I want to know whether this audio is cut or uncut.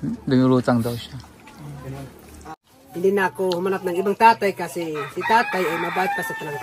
cut